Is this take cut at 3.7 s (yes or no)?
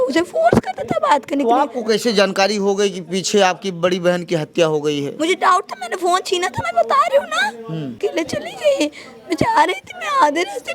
no